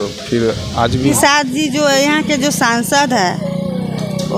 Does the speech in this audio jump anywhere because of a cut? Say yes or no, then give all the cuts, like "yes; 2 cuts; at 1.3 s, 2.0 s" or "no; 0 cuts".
yes; 1 cut; at 1.1 s